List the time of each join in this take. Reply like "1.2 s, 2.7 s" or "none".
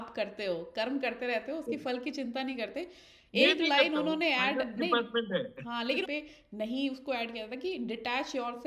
6.1 s